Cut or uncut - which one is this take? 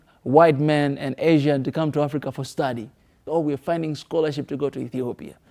cut